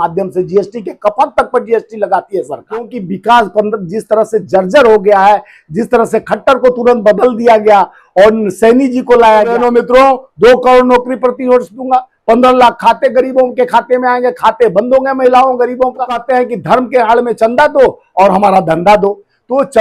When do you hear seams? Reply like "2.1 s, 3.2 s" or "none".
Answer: 3.0 s, 9.5 s, 16.2 s